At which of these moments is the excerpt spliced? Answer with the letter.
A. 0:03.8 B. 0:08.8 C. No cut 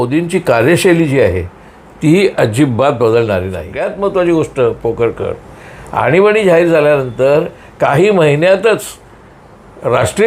A